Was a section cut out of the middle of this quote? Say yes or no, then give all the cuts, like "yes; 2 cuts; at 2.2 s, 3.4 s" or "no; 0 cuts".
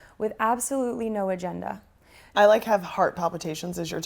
yes; 1 cut; at 2.3 s